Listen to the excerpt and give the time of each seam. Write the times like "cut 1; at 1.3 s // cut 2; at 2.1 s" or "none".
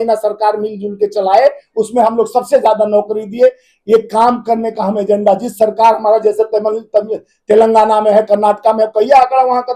none